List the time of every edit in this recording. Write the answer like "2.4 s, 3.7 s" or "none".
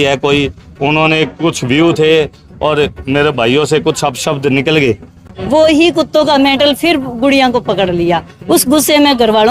5.3 s

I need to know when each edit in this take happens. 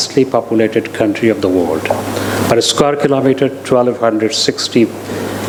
none

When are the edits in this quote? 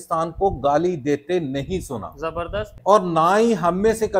2.7 s

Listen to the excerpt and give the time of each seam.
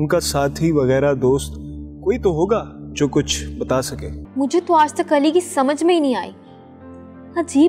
4.2 s

